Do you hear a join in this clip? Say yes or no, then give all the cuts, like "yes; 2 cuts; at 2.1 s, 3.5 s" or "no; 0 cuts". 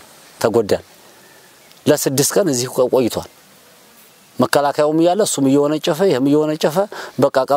no; 0 cuts